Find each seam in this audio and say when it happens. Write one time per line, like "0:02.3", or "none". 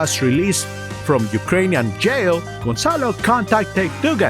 none